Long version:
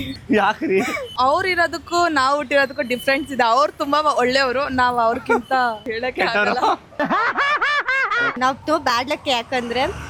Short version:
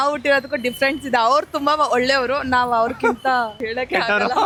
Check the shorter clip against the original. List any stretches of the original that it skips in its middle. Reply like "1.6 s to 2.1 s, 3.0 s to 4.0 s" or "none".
none